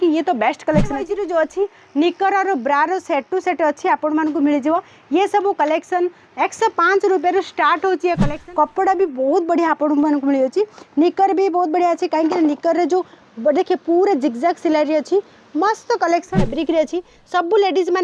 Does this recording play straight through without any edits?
no; 3 cuts; at 1.0 s, 8.3 s, 16.5 s

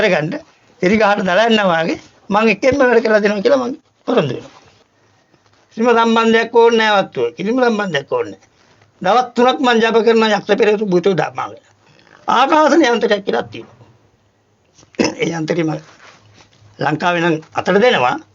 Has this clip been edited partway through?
yes; 1 cut; at 4.7 s

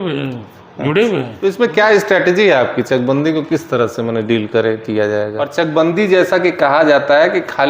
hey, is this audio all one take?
no; 2 cuts; at 1.4 s, 5.5 s

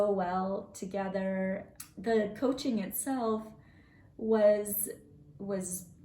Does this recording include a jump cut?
yes; 1 cut; at 1.7 s

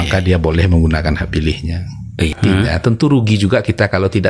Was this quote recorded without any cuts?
no; 1 cut; at 2.4 s

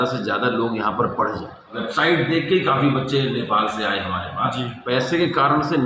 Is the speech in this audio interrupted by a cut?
yes; 2 cuts; at 1.8 s, 4.8 s

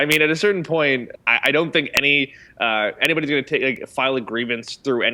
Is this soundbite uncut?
no; 1 cut; at 1.1 s

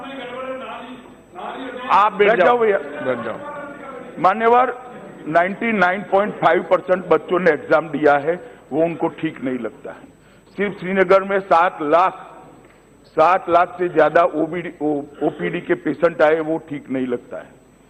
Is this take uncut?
yes; 0 cuts

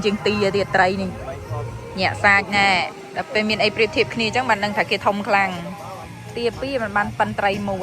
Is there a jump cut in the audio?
no; 0 cuts

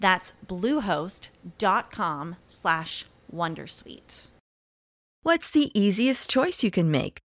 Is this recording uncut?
no; 1 cut; at 5.2 s

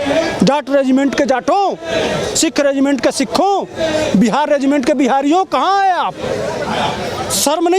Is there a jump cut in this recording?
no; 0 cuts

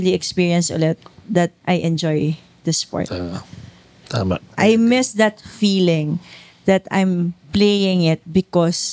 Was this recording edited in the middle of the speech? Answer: yes; 2 cuts; at 1.6 s, 4.5 s

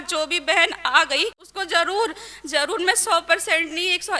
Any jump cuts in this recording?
yes; 1 cut; at 1.5 s

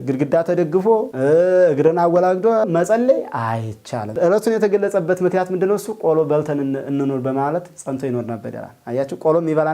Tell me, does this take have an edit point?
yes; 1 cut; at 4.1 s

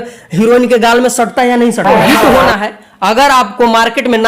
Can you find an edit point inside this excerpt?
yes; 1 cut; at 1.8 s

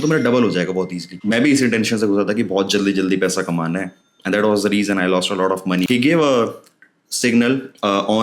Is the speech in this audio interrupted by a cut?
yes; 2 cuts; at 1.1 s, 5.9 s

